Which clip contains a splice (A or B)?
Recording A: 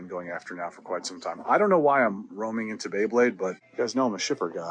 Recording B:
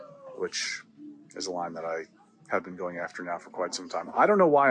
A